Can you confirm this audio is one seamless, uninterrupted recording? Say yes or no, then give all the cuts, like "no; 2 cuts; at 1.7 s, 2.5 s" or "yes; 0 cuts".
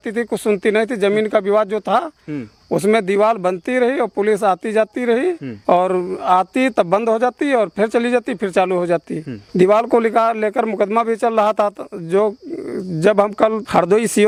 yes; 0 cuts